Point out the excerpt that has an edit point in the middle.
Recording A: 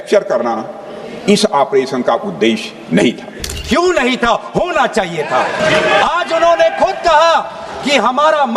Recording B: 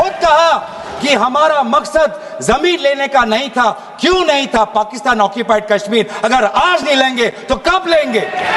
A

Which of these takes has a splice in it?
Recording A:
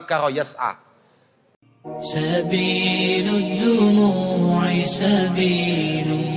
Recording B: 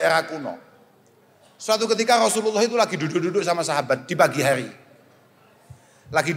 A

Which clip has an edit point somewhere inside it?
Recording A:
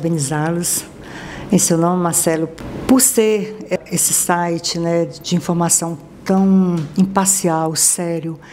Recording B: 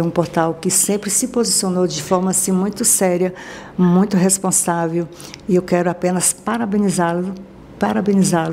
A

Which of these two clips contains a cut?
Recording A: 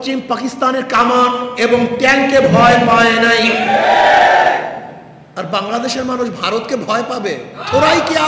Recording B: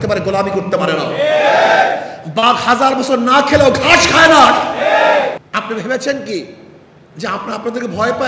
B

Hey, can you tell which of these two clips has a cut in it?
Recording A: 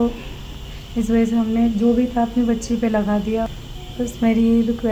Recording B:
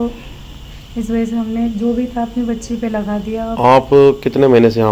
A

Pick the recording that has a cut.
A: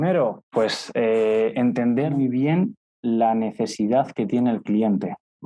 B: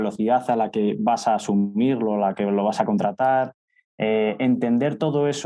A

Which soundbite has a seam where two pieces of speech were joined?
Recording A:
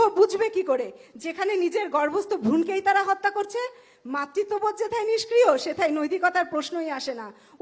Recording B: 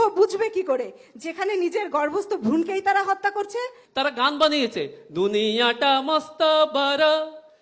B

